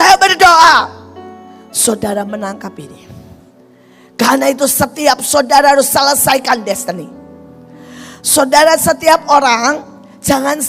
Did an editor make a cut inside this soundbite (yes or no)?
no